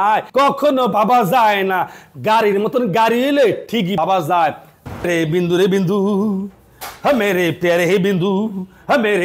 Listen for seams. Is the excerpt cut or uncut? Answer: cut